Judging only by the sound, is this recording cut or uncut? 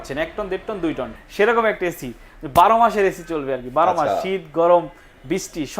cut